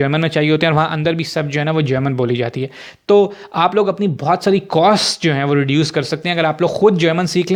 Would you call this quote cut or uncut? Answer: uncut